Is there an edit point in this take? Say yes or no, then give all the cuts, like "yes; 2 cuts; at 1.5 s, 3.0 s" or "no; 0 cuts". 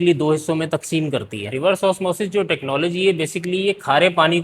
yes; 1 cut; at 1.4 s